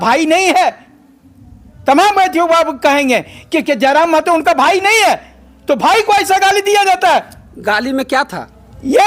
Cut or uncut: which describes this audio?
uncut